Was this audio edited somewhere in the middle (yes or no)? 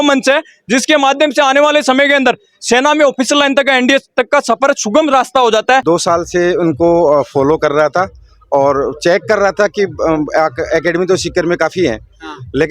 yes